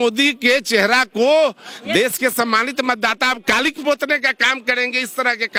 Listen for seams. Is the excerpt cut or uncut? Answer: uncut